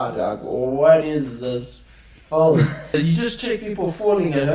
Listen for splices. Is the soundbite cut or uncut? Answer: cut